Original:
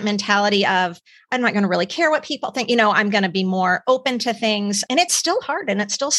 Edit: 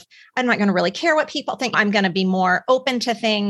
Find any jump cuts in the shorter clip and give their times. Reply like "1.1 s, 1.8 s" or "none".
1.7 s